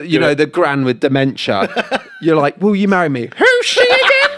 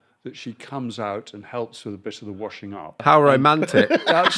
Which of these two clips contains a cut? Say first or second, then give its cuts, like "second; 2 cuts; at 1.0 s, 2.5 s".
second; 1 cut; at 3.0 s